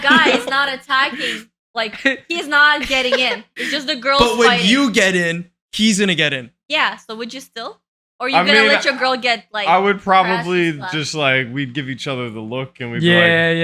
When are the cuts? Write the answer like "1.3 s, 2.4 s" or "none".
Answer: none